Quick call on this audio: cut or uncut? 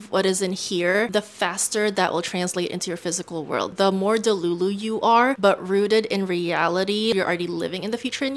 cut